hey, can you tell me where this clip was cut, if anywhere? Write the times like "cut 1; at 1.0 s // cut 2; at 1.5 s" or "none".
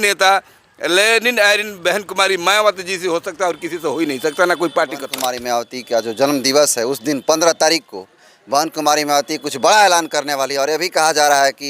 cut 1; at 5.1 s